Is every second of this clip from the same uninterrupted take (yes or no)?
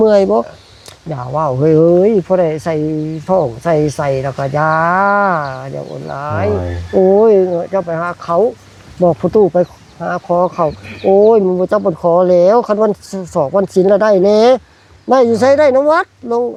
yes